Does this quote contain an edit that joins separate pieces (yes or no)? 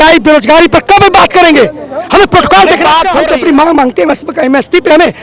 yes